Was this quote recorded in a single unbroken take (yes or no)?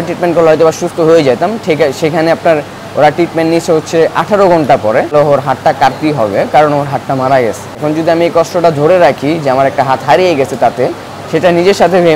no